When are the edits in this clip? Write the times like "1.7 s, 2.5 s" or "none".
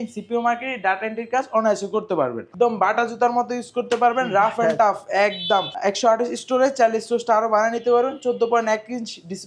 2.5 s, 5.7 s